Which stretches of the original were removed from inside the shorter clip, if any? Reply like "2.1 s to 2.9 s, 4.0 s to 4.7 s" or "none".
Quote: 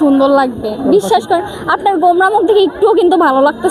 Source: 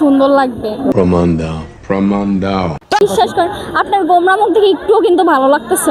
0.9 s to 3.0 s